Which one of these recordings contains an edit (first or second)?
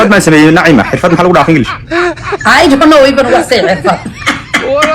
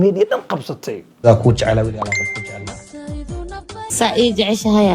second